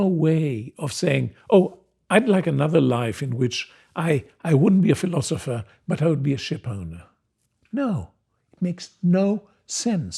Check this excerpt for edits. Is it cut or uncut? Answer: uncut